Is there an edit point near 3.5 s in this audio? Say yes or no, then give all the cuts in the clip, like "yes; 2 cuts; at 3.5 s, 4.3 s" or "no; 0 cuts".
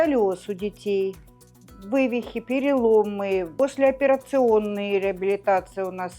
yes; 1 cut; at 3.5 s